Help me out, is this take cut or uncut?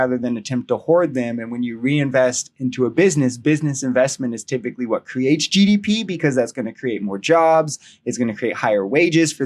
uncut